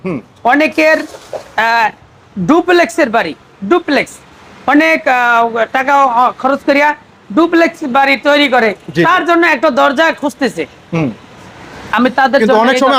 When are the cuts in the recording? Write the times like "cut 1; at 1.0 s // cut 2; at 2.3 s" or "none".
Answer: none